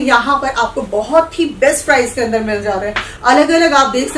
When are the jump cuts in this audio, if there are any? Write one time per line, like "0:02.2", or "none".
0:03.1